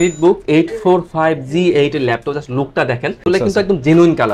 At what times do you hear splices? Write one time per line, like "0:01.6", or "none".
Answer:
none